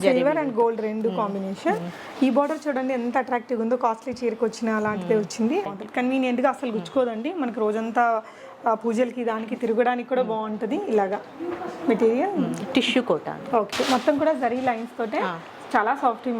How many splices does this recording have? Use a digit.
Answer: 2